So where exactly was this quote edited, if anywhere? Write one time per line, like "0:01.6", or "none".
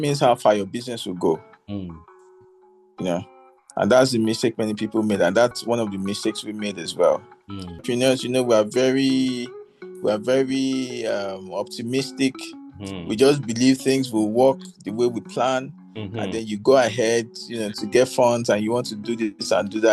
0:07.8